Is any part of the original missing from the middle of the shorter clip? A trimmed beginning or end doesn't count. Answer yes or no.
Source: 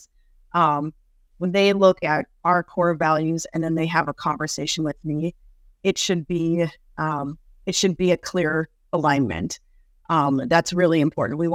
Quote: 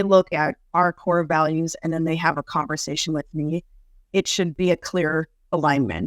yes